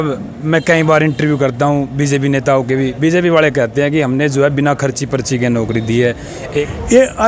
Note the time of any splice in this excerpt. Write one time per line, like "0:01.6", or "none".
0:06.4